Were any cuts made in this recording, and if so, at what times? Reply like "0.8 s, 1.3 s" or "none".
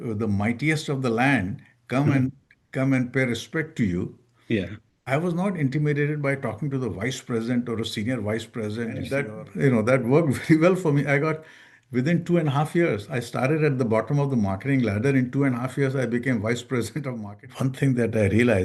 9.3 s, 17.1 s

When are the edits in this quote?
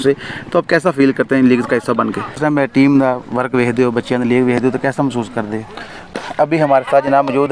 2.3 s, 6.1 s

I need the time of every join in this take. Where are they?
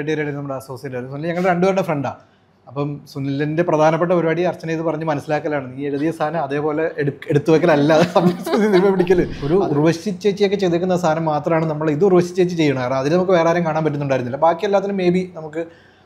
9.4 s

